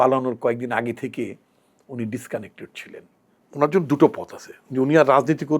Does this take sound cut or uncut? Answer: cut